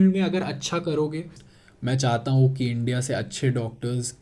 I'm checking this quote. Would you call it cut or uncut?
cut